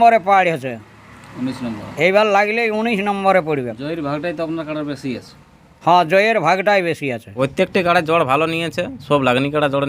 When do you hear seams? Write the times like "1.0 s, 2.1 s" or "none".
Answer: 7.2 s